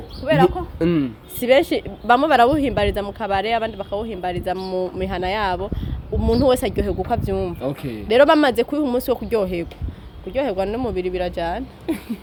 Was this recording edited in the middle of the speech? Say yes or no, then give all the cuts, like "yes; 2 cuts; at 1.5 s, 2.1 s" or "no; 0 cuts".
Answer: no; 0 cuts